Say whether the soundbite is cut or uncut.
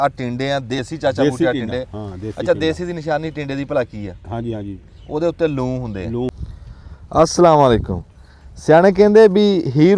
cut